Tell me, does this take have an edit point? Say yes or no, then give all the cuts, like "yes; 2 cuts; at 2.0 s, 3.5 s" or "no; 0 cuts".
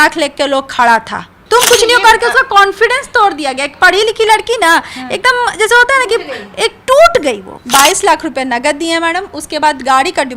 yes; 2 cuts; at 1.3 s, 7.5 s